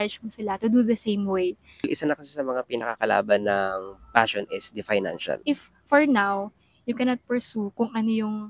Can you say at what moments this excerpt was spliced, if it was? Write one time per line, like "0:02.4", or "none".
0:01.8
0:05.4